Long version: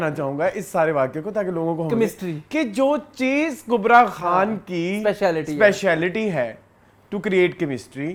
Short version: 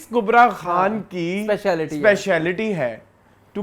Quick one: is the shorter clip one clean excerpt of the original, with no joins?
yes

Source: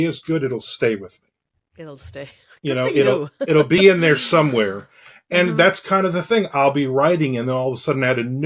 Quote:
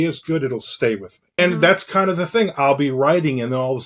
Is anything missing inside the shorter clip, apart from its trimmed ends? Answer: yes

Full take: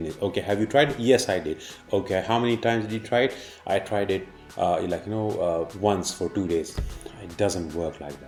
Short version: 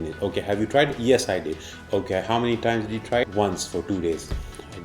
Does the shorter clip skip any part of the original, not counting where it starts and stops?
yes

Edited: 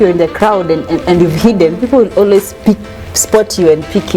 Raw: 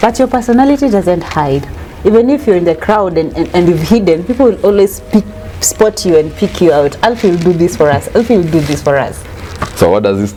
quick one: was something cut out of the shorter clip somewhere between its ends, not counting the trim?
no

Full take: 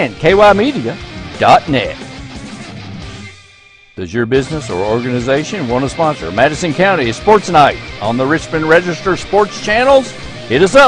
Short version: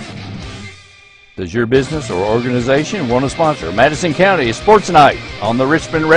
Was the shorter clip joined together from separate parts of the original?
no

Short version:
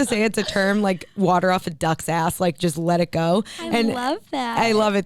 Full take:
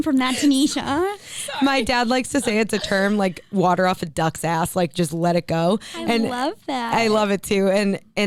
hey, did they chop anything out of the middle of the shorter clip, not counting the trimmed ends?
no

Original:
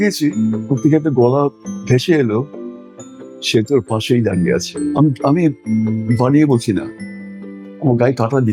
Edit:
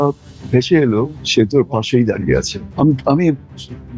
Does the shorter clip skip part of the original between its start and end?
yes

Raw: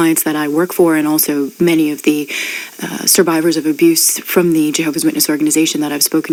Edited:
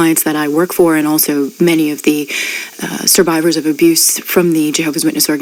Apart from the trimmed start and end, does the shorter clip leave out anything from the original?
no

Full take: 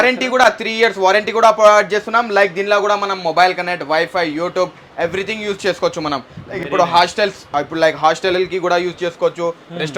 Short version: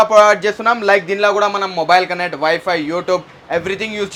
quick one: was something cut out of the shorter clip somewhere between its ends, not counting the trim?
no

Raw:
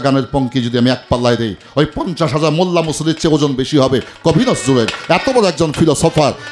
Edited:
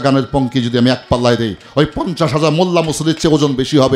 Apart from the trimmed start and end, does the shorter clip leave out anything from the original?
no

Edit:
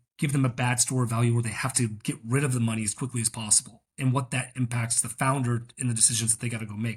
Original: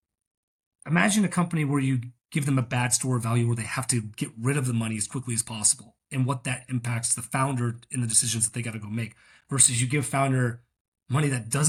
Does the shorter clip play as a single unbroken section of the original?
yes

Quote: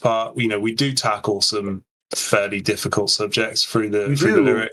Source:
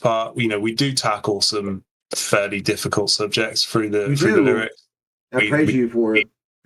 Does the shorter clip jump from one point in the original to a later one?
no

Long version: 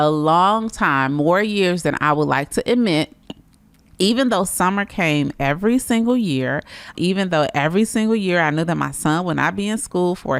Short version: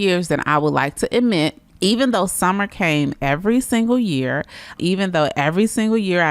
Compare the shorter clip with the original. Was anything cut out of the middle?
yes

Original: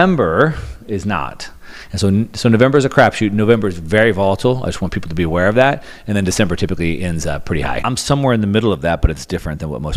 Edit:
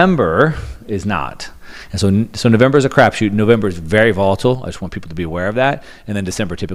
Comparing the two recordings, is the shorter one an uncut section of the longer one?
yes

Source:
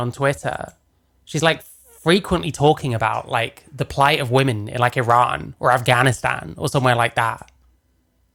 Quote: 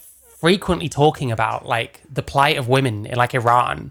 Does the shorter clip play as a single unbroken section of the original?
yes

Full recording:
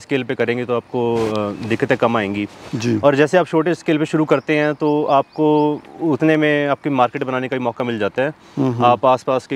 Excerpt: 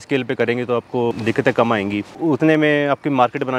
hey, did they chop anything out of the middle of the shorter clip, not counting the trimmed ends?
yes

